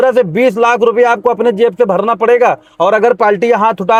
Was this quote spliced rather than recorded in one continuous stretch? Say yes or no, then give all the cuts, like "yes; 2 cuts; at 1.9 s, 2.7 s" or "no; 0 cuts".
no; 0 cuts